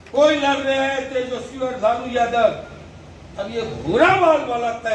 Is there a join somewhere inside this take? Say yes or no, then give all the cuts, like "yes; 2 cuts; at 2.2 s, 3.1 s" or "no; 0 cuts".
no; 0 cuts